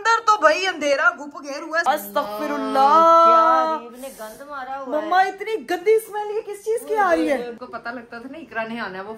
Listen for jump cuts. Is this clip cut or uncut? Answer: cut